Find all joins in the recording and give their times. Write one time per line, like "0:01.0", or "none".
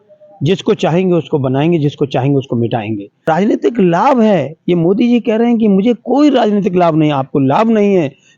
0:03.2